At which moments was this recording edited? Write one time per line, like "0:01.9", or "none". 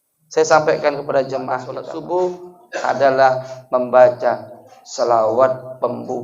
0:01.9